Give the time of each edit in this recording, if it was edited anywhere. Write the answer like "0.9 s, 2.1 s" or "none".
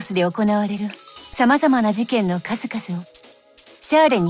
none